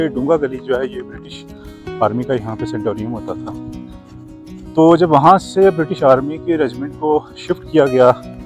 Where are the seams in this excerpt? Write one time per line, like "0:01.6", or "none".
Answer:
none